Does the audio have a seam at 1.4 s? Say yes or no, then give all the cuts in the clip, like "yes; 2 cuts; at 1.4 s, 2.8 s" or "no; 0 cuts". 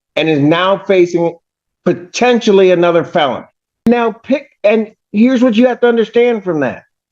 no; 1 cut; at 3.9 s